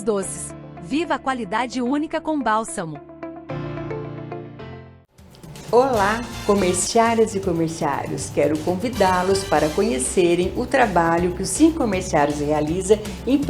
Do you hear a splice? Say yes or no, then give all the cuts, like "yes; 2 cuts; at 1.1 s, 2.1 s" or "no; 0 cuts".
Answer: yes; 1 cut; at 4.9 s